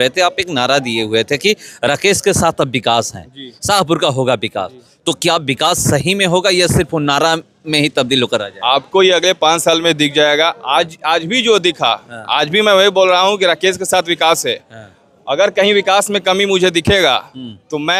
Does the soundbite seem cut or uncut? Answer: uncut